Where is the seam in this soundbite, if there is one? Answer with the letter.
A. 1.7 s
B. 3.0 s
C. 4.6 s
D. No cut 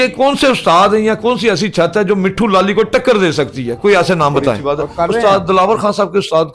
C